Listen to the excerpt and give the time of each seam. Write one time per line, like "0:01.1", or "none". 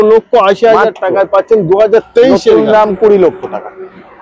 none